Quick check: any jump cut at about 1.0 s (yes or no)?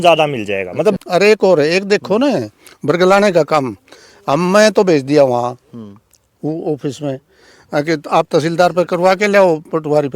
yes